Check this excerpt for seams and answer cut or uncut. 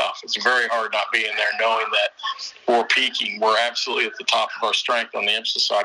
uncut